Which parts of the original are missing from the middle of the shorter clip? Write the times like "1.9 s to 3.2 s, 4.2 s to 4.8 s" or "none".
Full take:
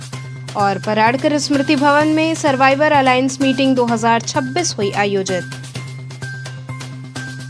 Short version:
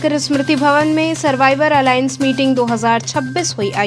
none